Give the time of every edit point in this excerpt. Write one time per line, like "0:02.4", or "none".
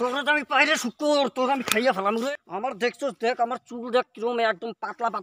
0:02.3

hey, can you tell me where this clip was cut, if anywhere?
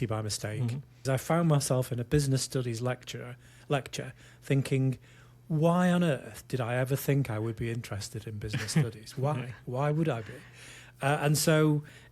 0:01.0

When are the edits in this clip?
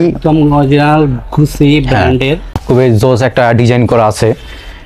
0:02.6

